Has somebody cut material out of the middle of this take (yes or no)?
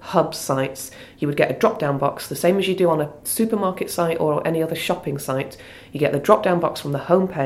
no